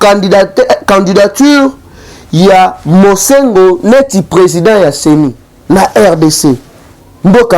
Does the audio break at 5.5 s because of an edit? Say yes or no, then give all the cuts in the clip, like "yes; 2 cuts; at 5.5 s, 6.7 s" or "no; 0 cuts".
yes; 1 cut; at 5.5 s